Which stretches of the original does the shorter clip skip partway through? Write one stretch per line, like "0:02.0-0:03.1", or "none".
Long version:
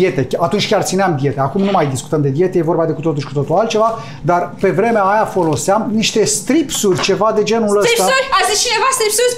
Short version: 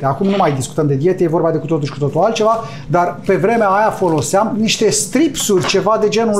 none